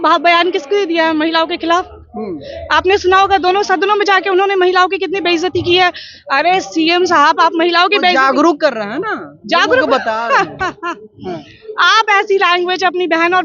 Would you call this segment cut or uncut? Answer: uncut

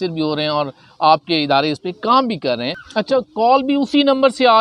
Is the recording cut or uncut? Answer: cut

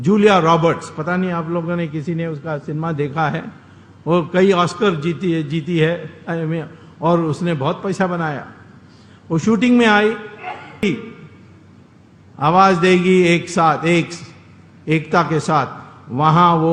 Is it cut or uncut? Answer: cut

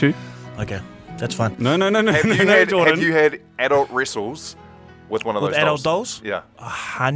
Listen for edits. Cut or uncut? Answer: uncut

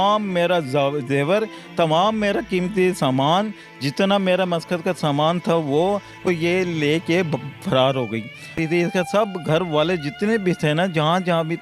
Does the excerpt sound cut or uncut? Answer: cut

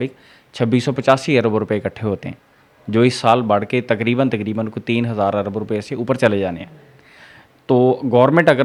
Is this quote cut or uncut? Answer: uncut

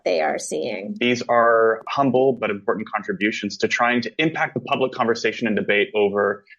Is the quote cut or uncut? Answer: cut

